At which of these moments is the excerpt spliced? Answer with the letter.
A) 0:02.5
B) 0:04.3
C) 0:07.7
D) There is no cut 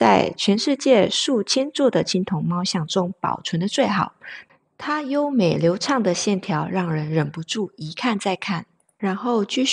D